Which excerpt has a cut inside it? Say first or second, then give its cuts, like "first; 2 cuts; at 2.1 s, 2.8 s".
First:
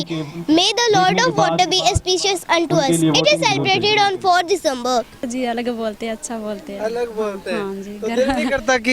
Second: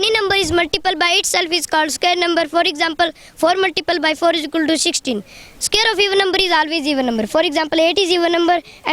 first; 1 cut; at 5.3 s